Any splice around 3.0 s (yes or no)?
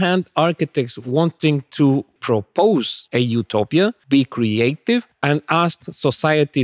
yes